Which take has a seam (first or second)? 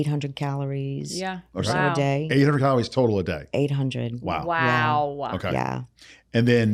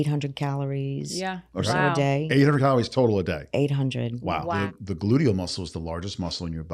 second